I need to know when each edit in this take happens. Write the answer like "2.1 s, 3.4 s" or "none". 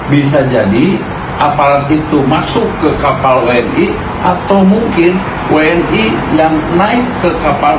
none